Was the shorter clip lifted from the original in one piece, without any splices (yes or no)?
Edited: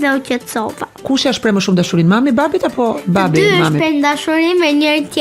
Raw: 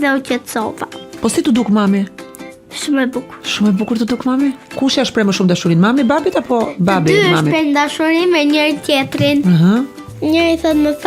no